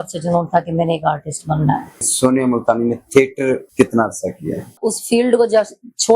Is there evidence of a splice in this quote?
yes; 3 cuts; at 2.1 s, 3.7 s, 4.8 s

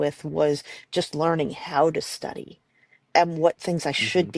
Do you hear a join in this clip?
yes; 1 cut; at 3.1 s

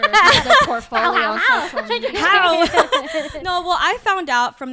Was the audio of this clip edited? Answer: no; 0 cuts

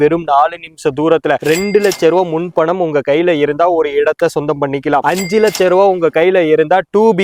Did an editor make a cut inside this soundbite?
no; 0 cuts

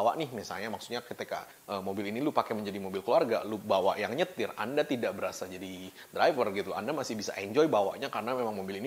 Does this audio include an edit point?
no; 0 cuts

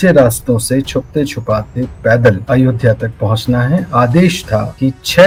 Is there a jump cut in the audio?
no; 0 cuts

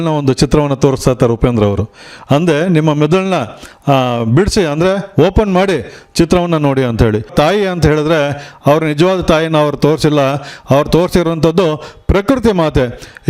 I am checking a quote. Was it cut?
yes; 1 cut; at 7.3 s

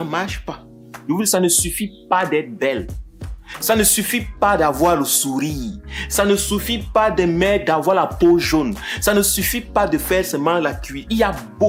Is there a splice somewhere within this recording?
yes; 1 cut; at 0.9 s

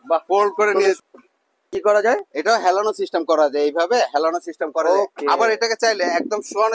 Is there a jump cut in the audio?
yes; 1 cut; at 1.0 s

